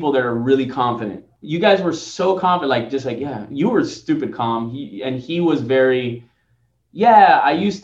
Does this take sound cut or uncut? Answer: uncut